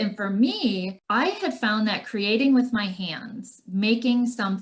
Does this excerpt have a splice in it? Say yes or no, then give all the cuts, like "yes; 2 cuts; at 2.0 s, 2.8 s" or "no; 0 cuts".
yes; 1 cut; at 1.0 s